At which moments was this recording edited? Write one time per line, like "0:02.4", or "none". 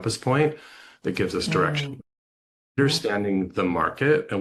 none